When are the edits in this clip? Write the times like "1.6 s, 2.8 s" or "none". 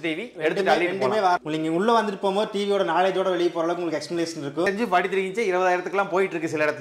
1.4 s, 4.7 s